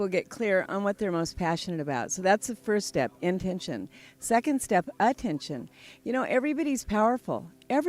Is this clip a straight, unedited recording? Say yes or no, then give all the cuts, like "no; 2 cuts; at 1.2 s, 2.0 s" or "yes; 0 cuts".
yes; 0 cuts